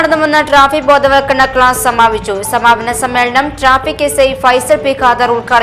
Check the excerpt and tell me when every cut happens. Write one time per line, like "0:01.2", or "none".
none